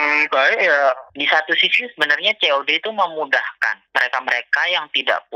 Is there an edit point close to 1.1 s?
yes; 2 cuts; at 1.1 s, 3.9 s

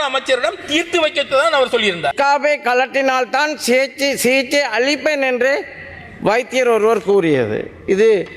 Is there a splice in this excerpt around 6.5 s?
no; 1 cut; at 2.1 s

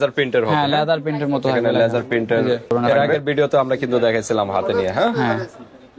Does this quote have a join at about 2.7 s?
yes; 1 cut; at 2.7 s

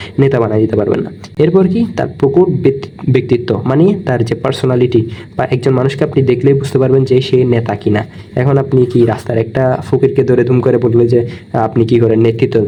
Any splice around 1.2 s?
no; 0 cuts

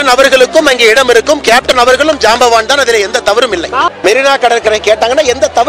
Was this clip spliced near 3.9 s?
yes; 1 cut; at 3.9 s

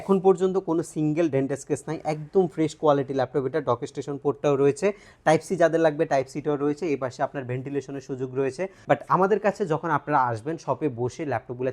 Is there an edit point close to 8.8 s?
yes; 1 cut; at 8.8 s

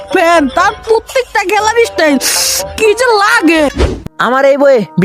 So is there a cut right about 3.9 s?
yes; 1 cut; at 3.9 s

